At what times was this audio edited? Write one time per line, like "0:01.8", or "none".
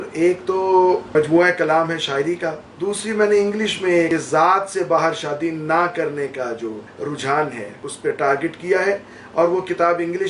0:01.1
0:02.7
0:04.1
0:06.9
0:07.9